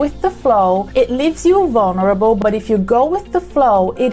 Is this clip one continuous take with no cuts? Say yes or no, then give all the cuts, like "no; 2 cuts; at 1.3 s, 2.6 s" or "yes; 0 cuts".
no; 2 cuts; at 0.9 s, 2.4 s